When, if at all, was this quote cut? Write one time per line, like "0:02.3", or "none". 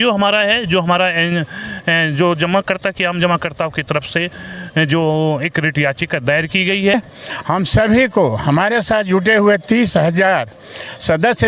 0:06.9